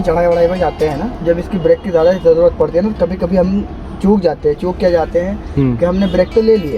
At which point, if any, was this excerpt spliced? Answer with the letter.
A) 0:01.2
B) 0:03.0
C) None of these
A